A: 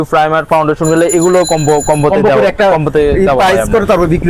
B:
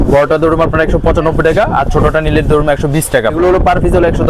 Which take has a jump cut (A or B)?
B